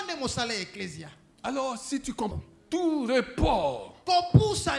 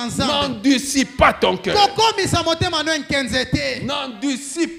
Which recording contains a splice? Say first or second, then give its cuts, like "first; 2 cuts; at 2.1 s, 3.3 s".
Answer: first; 1 cut; at 2.3 s